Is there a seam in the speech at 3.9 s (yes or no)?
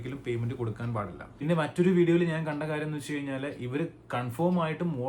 no